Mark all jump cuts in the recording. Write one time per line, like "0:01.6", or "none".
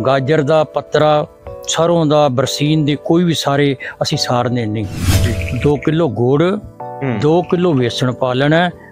0:05.3